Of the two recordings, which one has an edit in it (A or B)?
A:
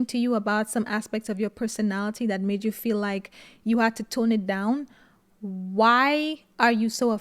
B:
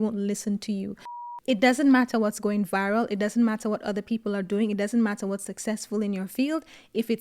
B